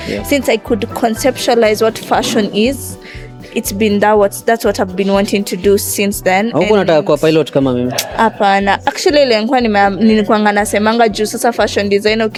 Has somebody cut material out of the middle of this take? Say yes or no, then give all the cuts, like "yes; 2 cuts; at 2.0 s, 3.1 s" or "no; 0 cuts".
no; 0 cuts